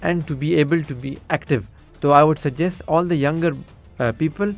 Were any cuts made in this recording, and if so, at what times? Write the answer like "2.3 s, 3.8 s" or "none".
1.8 s